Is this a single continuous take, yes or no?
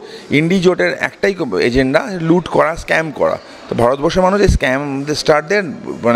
yes